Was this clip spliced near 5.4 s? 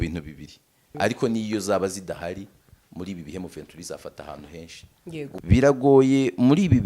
yes; 2 cuts; at 0.9 s, 5.4 s

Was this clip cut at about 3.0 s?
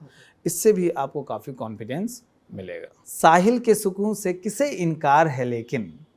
yes; 1 cut; at 3.0 s

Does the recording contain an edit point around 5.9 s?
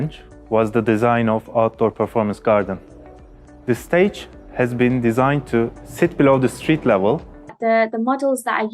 no; 1 cut; at 7.6 s

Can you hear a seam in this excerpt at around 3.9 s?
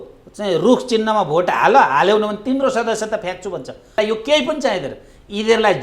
yes; 1 cut; at 3.9 s

